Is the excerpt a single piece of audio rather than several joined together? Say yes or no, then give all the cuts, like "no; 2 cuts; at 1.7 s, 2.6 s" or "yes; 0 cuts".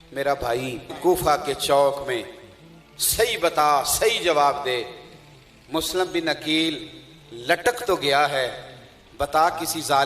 no; 1 cut; at 0.9 s